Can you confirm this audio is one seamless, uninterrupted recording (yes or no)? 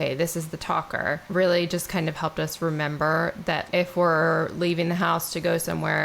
no